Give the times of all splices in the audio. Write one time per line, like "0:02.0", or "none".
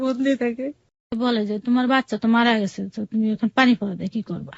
0:01.1